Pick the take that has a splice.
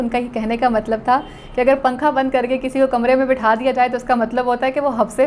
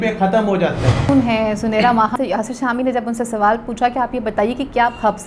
second; 2 cuts; at 1.1 s, 2.1 s

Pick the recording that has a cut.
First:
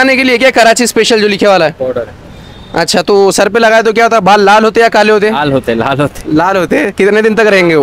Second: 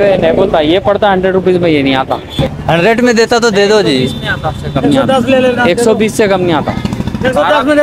second; 1 cut; at 2.4 s

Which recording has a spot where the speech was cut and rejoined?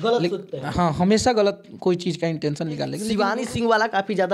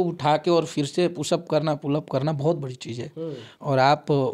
first; 1 cut; at 3.0 s

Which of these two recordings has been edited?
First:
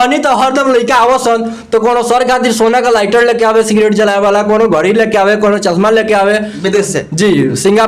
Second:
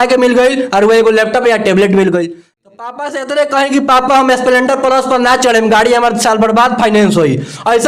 second; 1 cut; at 2.4 s

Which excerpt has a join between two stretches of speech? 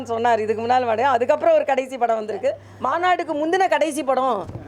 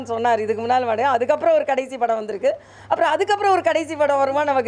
first; 1 cut; at 2.7 s

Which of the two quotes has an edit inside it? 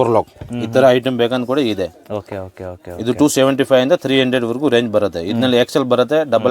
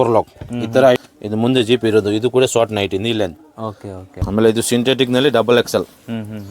second; 2 cuts; at 1.0 s, 4.2 s

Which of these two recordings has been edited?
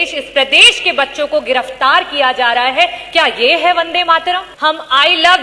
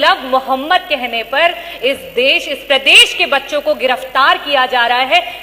first; 1 cut; at 4.5 s

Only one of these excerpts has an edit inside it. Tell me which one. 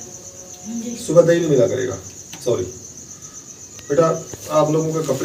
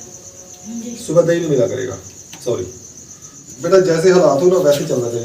second; 1 cut; at 3.4 s

